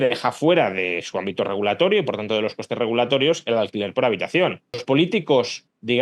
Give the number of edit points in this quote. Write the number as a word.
one